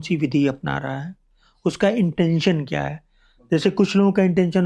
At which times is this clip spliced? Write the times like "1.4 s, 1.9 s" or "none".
none